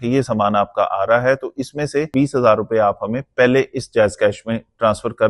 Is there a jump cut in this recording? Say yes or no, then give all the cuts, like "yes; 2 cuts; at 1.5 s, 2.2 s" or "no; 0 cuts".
yes; 1 cut; at 2.1 s